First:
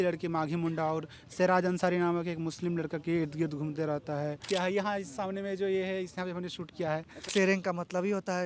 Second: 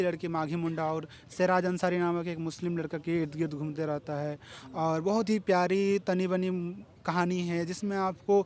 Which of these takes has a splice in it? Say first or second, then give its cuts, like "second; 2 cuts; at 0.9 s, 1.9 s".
first; 2 cuts; at 4.4 s, 7.2 s